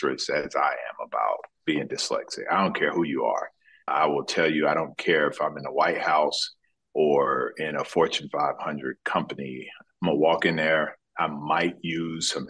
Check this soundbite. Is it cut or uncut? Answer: cut